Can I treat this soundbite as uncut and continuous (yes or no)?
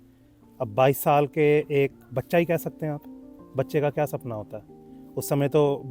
yes